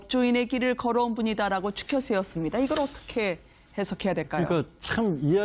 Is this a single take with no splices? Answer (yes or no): no